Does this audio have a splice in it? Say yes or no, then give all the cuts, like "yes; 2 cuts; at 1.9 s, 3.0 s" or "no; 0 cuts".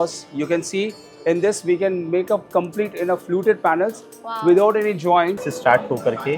yes; 1 cut; at 5.5 s